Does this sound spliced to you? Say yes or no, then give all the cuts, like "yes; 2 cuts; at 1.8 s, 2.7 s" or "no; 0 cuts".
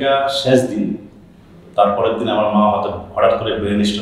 no; 0 cuts